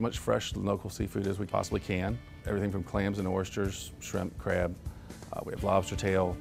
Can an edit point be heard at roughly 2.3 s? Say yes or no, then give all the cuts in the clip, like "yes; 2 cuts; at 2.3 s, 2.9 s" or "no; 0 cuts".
yes; 2 cuts; at 1.4 s, 2.3 s